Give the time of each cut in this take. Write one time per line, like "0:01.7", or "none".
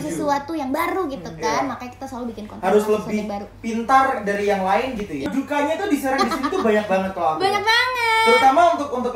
0:05.2